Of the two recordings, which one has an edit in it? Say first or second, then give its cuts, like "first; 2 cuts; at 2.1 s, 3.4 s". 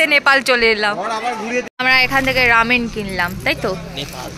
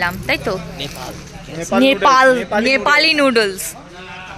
first; 1 cut; at 1.7 s